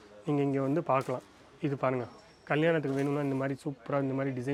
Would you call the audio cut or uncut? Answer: uncut